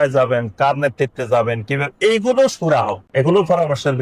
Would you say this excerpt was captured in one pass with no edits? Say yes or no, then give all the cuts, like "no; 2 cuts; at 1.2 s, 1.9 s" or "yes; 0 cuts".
no; 1 cut; at 3.0 s